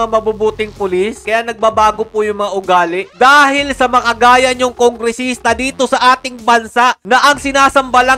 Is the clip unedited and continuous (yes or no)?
yes